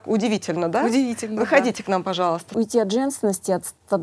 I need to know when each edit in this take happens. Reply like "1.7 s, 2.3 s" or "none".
2.5 s